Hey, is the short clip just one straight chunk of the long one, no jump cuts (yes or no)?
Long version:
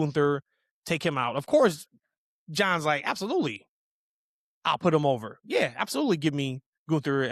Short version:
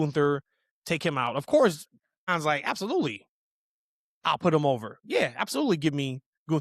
no